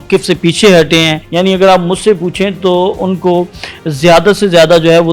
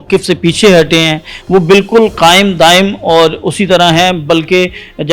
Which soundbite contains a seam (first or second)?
first